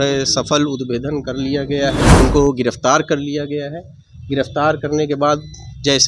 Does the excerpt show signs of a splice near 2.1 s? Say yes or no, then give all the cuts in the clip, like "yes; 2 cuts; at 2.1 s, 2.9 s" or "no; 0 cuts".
yes; 1 cut; at 2.1 s